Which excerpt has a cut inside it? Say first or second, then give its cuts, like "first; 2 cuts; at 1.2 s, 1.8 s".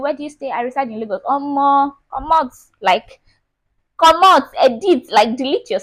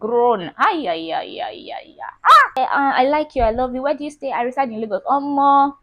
second; 1 cut; at 2.6 s